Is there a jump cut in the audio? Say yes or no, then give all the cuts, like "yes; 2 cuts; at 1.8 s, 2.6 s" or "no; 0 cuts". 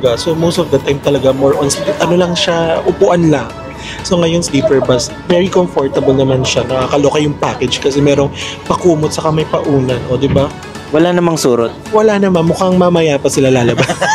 no; 0 cuts